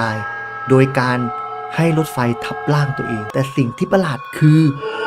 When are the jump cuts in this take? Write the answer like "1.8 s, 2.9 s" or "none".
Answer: 3.2 s